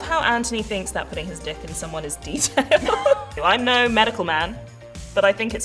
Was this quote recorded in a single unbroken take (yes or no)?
no